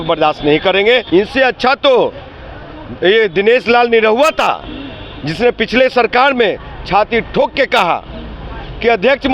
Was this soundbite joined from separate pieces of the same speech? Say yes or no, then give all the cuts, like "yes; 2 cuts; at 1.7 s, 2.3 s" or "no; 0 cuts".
yes; 1 cut; at 1.0 s